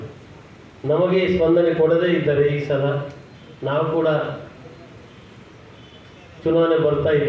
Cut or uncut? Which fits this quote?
uncut